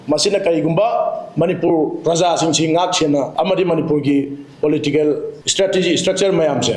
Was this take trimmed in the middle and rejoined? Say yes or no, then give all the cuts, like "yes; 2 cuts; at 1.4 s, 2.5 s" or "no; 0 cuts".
yes; 2 cuts; at 3.3 s, 5.4 s